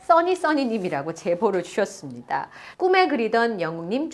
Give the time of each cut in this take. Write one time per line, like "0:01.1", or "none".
0:02.6